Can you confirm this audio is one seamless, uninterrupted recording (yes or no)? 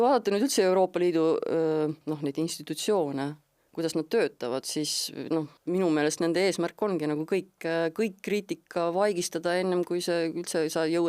no